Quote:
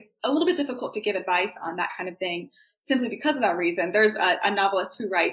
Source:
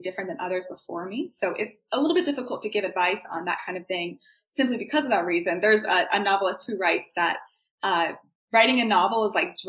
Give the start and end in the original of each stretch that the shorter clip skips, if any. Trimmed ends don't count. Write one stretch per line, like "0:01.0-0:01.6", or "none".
none